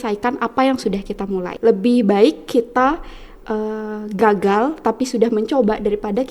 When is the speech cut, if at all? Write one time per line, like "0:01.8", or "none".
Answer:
0:01.5